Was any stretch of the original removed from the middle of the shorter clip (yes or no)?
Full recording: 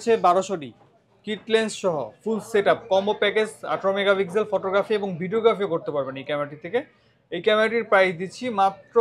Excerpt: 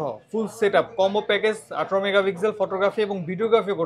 no